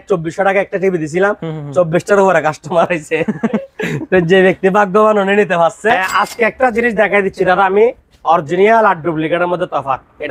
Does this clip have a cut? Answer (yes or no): yes